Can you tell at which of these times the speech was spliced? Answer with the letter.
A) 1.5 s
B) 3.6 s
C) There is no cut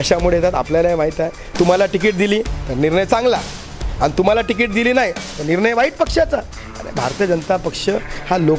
A